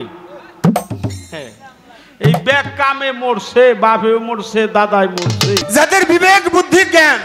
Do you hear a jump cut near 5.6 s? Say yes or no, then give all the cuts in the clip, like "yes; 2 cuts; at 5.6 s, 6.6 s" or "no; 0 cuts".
yes; 1 cut; at 5.6 s